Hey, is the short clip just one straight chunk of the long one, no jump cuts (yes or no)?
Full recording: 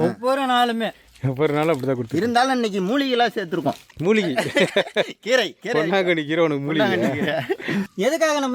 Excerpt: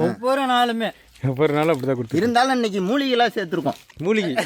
yes